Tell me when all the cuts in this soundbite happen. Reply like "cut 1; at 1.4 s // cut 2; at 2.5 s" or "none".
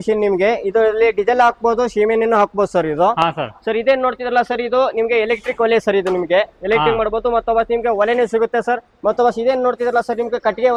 none